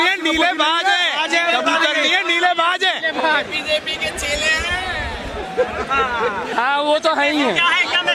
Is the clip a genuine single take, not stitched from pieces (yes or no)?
yes